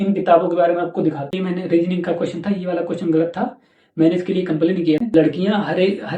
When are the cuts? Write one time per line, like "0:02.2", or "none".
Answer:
0:01.3
0:05.0